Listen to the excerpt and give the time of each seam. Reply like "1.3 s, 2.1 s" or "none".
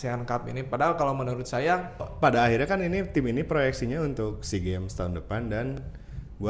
2.1 s